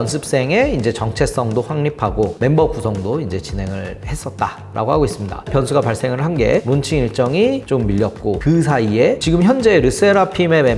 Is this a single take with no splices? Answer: no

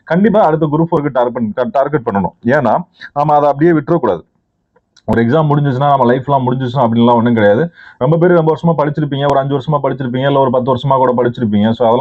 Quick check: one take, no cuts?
yes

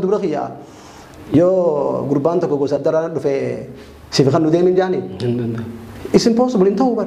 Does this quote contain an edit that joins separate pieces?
no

